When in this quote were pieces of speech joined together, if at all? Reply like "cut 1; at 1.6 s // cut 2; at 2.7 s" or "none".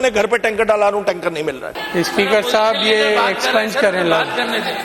cut 1; at 1.7 s